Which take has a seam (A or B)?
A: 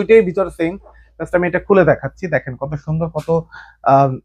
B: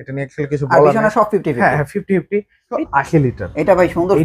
B